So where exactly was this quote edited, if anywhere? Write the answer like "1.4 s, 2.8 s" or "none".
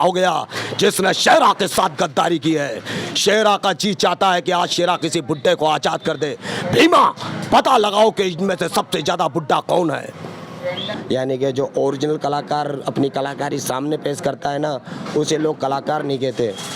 10.9 s